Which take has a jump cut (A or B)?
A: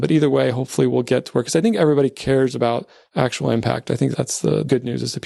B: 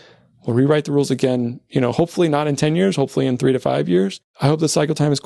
B